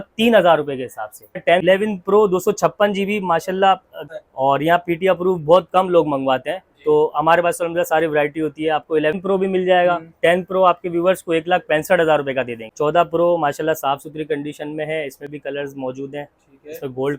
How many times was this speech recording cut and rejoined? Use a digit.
4